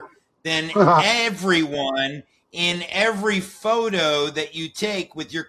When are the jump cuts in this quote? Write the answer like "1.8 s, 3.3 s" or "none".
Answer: none